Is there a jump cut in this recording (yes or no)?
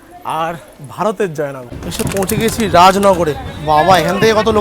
yes